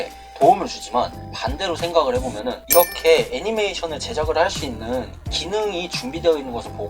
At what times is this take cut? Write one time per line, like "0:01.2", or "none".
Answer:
0:02.6